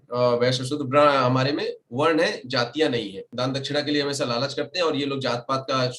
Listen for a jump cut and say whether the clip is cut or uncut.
cut